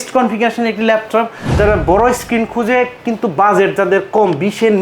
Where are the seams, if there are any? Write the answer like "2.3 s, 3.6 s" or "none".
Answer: 1.6 s